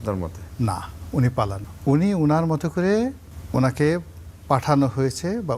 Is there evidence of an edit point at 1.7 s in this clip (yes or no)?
yes